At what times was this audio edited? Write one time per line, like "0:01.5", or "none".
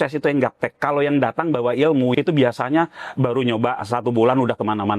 0:02.1